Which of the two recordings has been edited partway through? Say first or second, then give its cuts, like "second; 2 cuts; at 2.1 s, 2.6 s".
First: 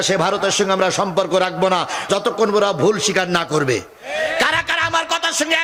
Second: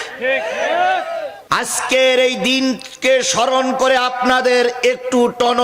second; 1 cut; at 1.4 s